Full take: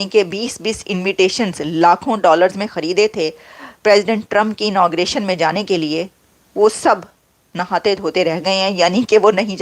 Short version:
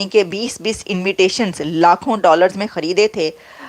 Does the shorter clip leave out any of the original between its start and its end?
no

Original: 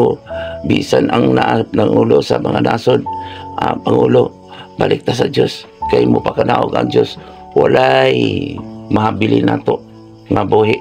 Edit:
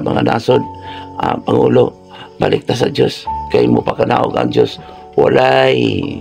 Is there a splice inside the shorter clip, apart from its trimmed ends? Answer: no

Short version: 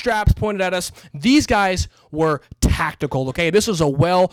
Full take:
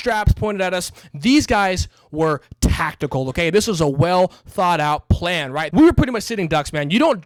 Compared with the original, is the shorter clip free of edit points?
yes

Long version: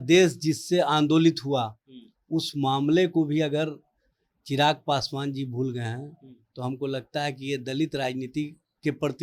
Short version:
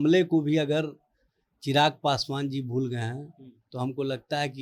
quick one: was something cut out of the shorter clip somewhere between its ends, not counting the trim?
no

